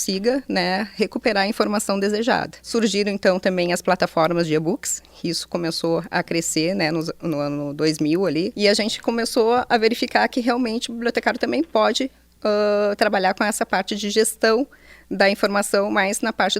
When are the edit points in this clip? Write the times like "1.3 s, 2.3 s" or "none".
2.7 s, 8.5 s